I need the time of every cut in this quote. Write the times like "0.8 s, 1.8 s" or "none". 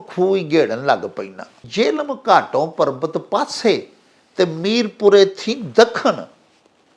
1.6 s